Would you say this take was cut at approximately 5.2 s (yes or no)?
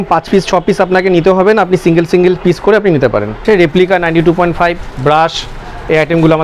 no